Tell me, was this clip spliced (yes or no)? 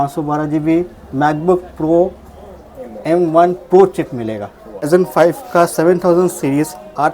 yes